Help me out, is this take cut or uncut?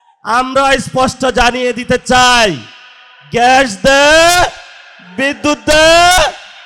uncut